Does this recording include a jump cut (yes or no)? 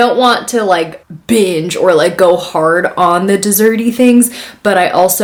no